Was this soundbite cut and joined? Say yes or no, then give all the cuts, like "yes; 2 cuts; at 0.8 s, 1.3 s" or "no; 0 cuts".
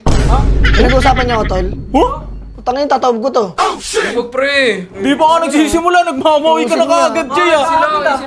no; 0 cuts